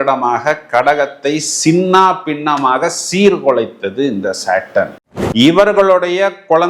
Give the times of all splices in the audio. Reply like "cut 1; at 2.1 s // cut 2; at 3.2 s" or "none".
cut 1; at 4.9 s